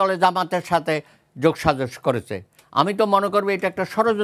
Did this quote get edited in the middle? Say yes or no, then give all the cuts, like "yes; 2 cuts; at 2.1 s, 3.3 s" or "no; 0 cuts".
no; 0 cuts